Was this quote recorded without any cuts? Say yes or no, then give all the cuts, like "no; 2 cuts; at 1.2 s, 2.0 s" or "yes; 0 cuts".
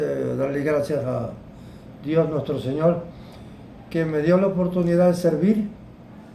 yes; 0 cuts